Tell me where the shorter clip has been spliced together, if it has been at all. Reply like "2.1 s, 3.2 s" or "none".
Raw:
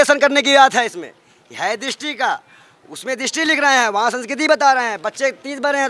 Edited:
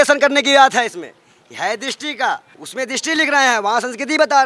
2.6 s